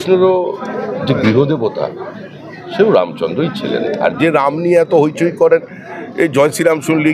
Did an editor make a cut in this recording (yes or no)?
no